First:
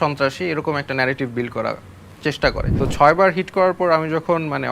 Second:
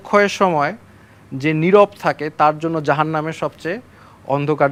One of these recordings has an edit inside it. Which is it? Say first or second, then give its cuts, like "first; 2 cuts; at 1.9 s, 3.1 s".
first; 1 cut; at 2.7 s